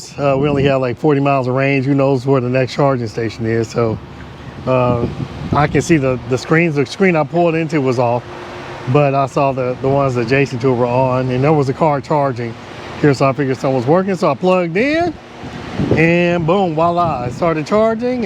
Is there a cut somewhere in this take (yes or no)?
no